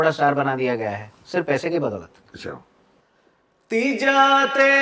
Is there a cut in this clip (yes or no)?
yes